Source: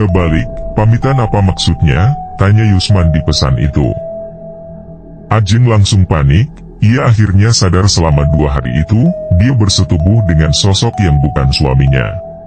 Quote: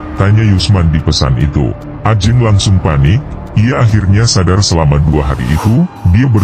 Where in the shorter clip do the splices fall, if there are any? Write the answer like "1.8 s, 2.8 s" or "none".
1.8 s